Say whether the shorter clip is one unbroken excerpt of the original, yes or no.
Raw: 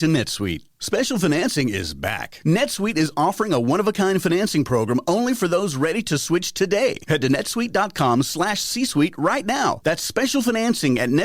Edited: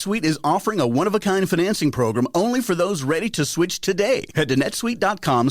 yes